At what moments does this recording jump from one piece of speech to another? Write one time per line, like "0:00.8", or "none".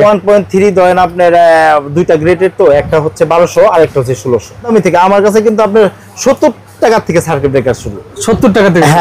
0:04.7